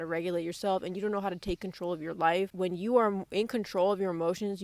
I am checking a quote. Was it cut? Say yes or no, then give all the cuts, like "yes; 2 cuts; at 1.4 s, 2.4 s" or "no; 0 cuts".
no; 0 cuts